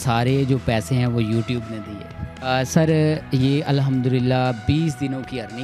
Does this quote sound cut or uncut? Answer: cut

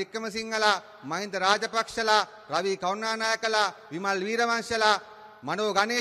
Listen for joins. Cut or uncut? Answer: uncut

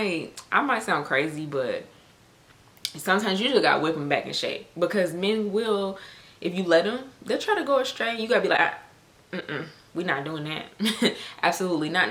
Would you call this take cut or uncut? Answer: uncut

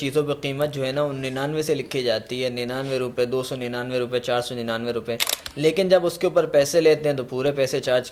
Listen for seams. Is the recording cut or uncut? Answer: uncut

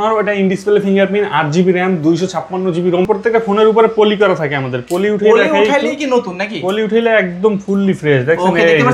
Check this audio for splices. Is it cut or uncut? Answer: cut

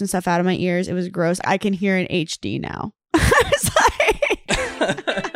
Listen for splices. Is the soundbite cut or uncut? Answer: cut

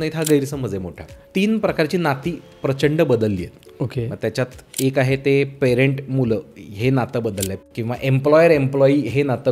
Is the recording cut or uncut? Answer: cut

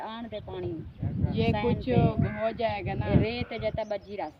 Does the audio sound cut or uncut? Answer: uncut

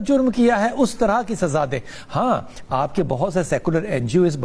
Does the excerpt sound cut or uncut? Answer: uncut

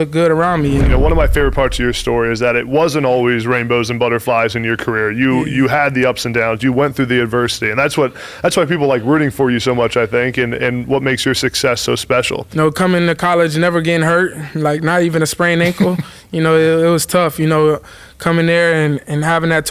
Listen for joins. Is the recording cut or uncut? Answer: cut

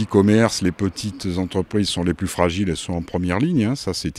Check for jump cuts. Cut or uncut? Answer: uncut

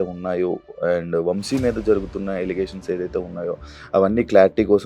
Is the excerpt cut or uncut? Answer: uncut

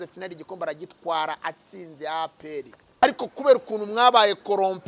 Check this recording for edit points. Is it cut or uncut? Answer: cut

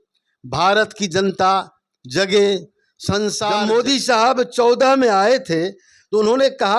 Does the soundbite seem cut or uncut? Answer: cut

